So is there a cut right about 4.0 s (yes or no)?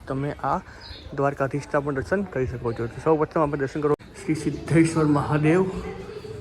yes